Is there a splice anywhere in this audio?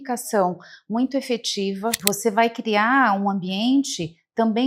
yes; 1 cut; at 2.1 s

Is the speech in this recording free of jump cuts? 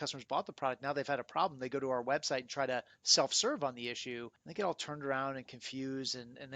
no; 1 cut; at 4.4 s

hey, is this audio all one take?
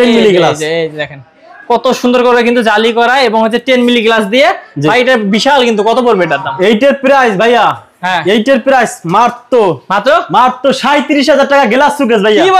yes; 0 cuts

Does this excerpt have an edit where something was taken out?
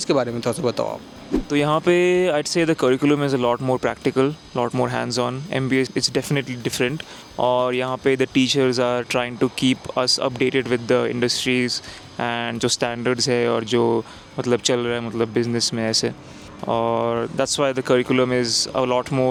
no; 0 cuts

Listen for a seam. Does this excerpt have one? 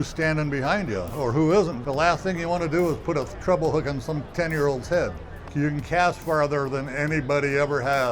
yes; 2 cuts; at 1.8 s, 5.4 s

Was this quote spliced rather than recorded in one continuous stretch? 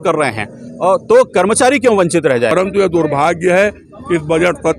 yes; 1 cut; at 2.5 s

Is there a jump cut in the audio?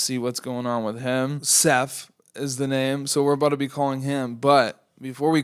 yes; 1 cut; at 1.5 s

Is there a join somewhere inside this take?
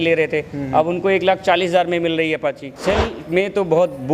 yes; 1 cut; at 2.7 s

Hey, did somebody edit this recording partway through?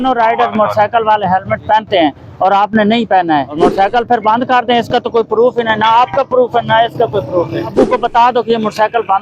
yes; 2 cuts; at 3.6 s, 7.7 s

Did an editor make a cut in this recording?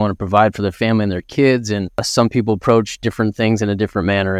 yes; 1 cut; at 2.0 s

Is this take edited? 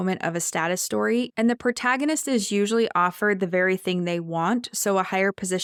no; 0 cuts

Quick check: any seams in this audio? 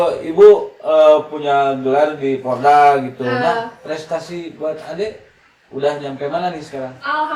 no; 0 cuts

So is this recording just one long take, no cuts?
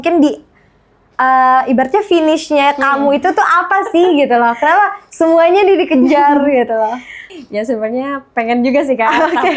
no; 1 cut; at 7.3 s

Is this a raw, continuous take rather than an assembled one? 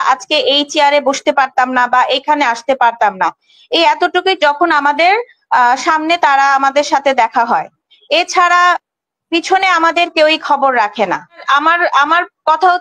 no; 1 cut; at 11.4 s

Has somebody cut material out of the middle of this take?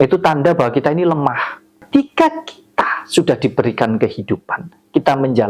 yes; 1 cut; at 1.8 s

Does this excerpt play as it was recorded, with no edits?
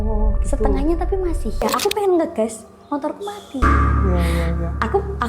no; 1 cut; at 1.6 s

